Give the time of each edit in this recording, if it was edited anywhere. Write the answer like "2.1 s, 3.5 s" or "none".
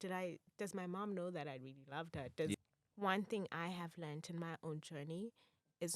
2.5 s